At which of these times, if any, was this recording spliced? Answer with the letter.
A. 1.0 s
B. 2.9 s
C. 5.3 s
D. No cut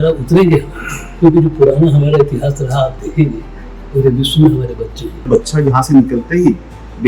C